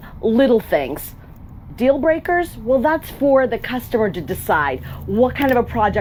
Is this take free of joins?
yes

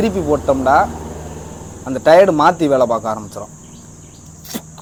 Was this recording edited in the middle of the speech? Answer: no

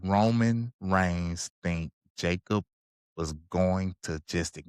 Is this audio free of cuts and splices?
yes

